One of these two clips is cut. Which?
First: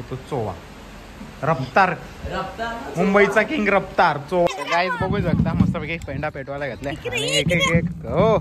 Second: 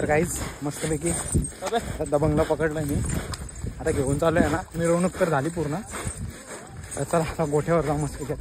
first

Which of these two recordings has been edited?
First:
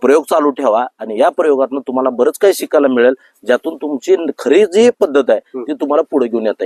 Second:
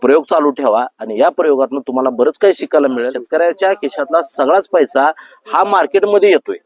second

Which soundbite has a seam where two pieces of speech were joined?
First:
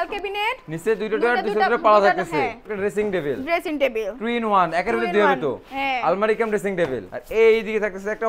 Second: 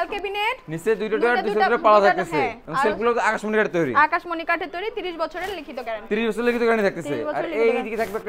first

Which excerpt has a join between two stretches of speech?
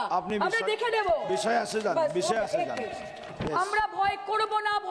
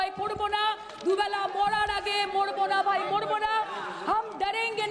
first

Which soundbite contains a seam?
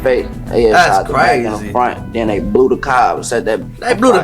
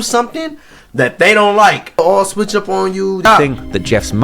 second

